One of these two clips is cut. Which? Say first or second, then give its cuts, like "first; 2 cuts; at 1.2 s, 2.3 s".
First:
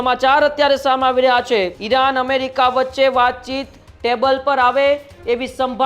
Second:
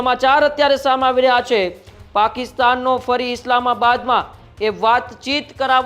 first; 1 cut; at 1.8 s